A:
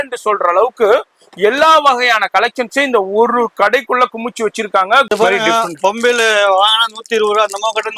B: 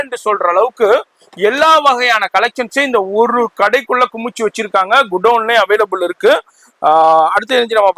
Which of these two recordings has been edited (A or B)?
A